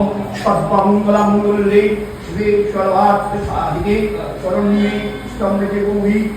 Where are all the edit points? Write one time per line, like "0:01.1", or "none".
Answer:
none